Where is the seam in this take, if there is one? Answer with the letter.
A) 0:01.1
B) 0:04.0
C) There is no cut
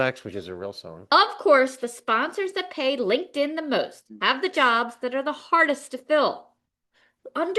A